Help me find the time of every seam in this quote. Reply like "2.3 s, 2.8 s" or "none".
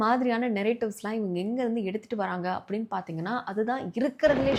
none